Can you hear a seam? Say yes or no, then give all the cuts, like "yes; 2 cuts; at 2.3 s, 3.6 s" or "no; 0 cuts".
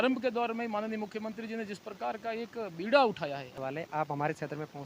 yes; 1 cut; at 3.5 s